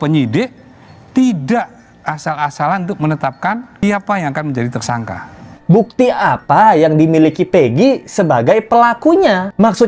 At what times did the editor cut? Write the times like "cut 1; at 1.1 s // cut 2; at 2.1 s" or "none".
cut 1; at 3.7 s // cut 2; at 5.5 s